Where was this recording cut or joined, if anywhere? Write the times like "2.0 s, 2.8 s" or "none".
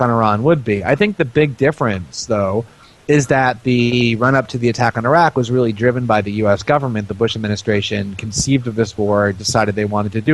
1.9 s